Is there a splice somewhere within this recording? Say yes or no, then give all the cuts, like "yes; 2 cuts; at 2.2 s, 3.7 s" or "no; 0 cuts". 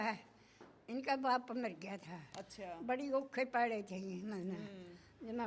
no; 0 cuts